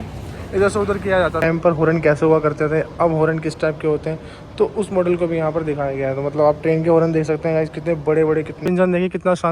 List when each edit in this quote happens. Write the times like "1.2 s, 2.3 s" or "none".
1.4 s, 8.5 s